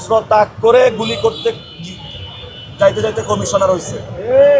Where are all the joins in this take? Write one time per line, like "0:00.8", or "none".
none